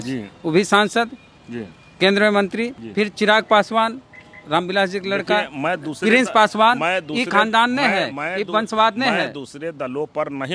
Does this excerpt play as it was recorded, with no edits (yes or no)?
yes